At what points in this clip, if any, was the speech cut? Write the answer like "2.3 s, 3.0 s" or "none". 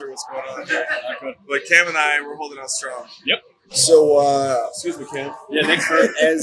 3.6 s